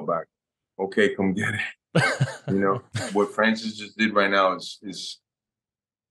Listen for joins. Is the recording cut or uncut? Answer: cut